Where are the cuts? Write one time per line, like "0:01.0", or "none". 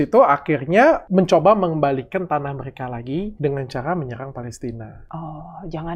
0:01.0
0:03.3
0:05.0